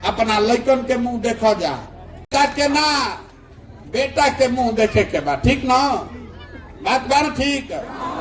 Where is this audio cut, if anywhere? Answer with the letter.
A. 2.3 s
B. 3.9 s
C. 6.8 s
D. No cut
A